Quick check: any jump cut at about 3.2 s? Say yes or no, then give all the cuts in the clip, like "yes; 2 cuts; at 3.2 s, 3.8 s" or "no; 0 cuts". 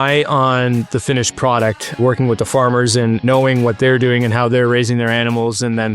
yes; 2 cuts; at 2.0 s, 3.2 s